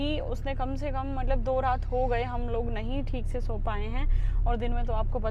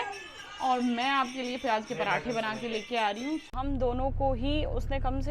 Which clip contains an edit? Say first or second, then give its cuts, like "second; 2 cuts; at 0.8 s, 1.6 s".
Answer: second; 1 cut; at 3.5 s